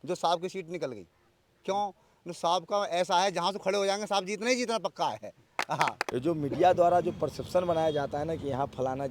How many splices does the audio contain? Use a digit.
1